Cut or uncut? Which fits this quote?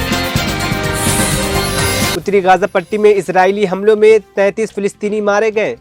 cut